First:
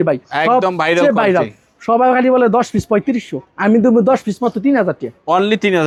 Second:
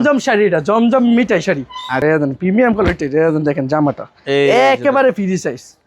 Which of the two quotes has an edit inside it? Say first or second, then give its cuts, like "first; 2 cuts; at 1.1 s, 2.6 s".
second; 1 cut; at 2.0 s